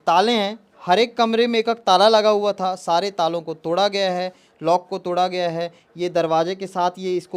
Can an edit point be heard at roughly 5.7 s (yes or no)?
no